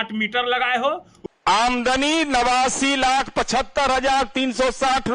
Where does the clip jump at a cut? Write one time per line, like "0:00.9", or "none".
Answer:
0:01.1